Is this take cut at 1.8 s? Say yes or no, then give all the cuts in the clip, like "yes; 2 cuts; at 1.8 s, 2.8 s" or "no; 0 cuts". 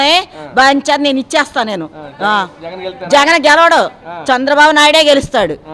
no; 0 cuts